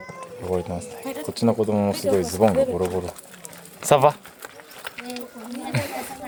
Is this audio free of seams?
yes; 0 cuts

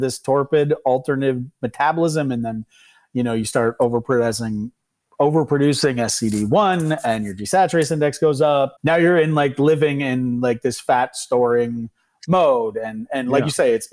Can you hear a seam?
yes; 1 cut; at 8.8 s

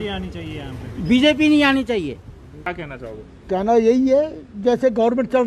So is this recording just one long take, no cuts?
no; 1 cut; at 2.7 s

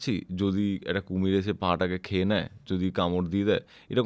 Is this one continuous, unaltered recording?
yes; 0 cuts

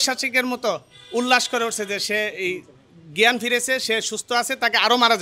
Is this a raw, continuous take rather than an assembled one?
yes; 0 cuts

